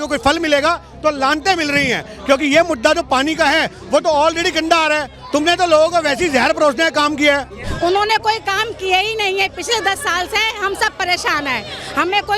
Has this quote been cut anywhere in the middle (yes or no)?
yes